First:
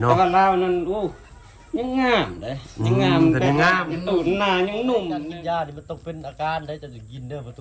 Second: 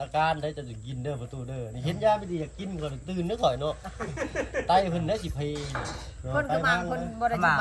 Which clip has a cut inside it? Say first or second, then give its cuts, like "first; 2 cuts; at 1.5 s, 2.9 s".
first; 1 cut; at 5.2 s